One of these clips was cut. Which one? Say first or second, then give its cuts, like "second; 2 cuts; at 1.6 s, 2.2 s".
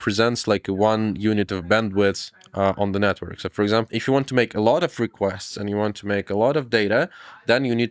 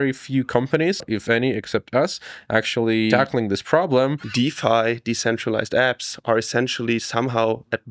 second; 3 cuts; at 1.1 s, 3.1 s, 4.2 s